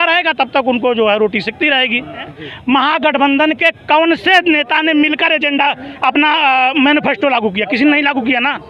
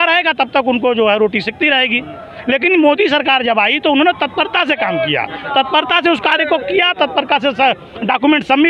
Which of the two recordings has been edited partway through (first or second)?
first